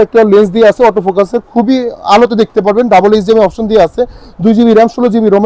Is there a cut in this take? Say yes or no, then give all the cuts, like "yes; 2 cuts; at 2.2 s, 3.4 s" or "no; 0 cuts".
no; 0 cuts